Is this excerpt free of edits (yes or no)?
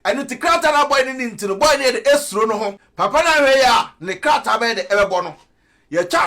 no